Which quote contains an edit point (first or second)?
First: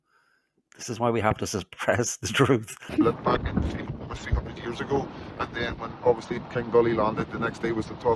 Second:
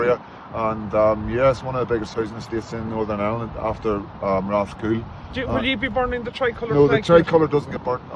first